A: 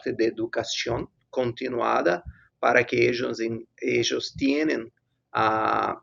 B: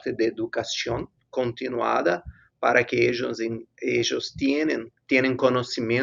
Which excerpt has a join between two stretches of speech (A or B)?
B